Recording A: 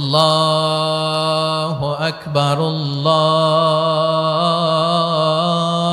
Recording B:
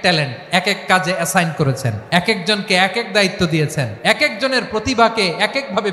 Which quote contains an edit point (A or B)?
B